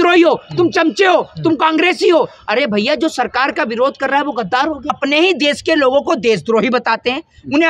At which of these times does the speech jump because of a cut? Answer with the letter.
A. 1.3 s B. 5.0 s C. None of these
B